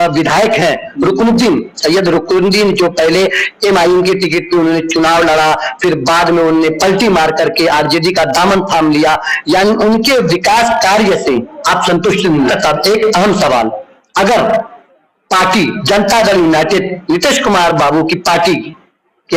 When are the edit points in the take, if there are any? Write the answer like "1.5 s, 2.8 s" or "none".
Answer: 12.5 s